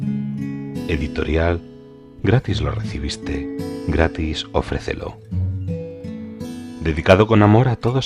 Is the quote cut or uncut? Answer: cut